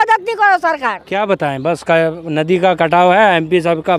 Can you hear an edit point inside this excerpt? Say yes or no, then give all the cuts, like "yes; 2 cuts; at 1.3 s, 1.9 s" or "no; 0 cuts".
yes; 1 cut; at 1.0 s